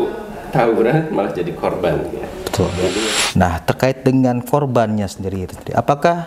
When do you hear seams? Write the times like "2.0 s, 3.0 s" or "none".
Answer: 3.0 s

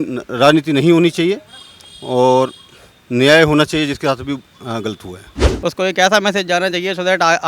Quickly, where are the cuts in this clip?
5.5 s

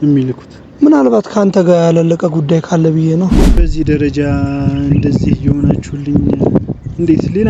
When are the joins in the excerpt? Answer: 3.7 s

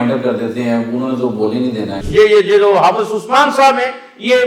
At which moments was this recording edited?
2.0 s

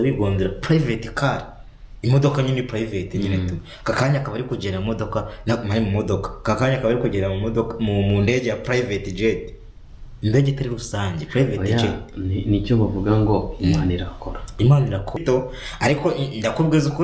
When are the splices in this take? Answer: 15.2 s

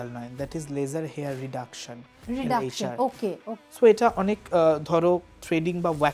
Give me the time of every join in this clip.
3.5 s

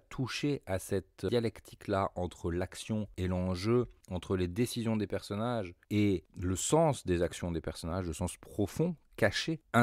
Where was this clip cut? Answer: 1.3 s

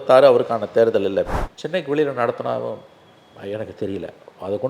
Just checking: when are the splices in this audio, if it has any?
1.3 s

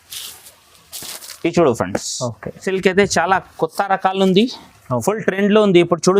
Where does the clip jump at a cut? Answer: 2.7 s

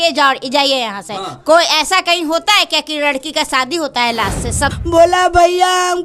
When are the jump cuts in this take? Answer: 4.8 s

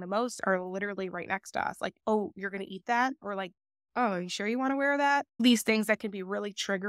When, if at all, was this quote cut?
1.9 s, 3.2 s, 5.4 s

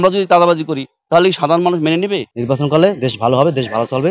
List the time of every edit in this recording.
2.3 s

